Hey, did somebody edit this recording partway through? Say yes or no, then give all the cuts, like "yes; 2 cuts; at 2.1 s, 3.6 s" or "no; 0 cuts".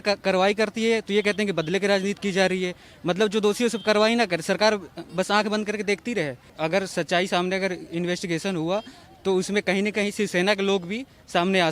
yes; 1 cut; at 6.4 s